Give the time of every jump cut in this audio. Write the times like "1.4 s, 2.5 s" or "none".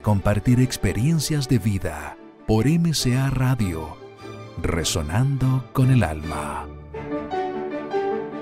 7.1 s

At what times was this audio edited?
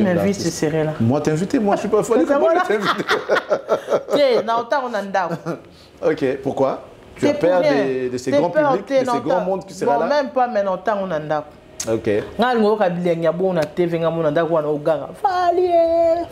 none

